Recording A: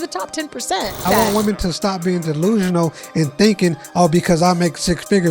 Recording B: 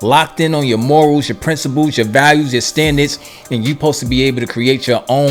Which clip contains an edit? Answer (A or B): A